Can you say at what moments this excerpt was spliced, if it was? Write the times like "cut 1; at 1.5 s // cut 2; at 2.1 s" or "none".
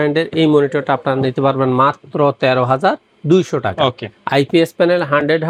none